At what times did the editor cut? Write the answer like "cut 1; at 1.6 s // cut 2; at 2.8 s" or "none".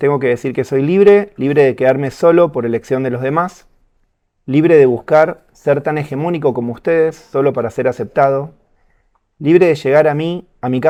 none